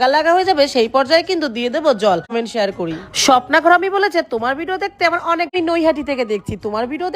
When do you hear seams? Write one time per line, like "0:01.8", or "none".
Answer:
0:02.3
0:05.5